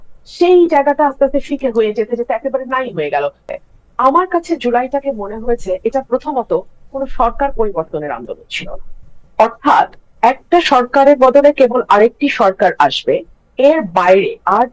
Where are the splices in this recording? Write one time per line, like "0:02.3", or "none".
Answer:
0:03.5